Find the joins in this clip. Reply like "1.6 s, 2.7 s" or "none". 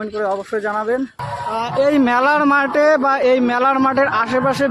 1.6 s